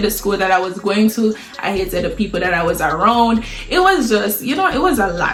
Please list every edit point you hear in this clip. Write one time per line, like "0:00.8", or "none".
none